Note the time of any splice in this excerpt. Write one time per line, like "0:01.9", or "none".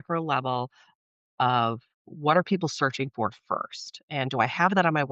none